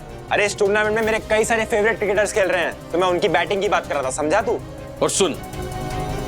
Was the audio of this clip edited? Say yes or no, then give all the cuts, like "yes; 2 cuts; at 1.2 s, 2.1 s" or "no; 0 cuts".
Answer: yes; 1 cut; at 4.6 s